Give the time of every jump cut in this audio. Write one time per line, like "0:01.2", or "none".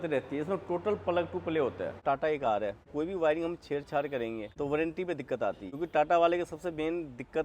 0:02.0
0:02.9
0:04.5
0:05.7